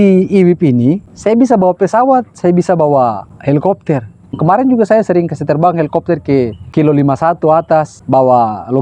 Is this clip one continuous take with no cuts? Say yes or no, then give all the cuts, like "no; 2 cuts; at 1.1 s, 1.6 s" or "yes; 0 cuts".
no; 5 cuts; at 1.1 s, 3.3 s, 4.3 s, 6.6 s, 8.0 s